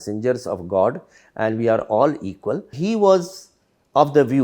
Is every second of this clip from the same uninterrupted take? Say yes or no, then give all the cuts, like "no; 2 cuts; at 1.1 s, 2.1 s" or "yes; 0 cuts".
no; 1 cut; at 2.8 s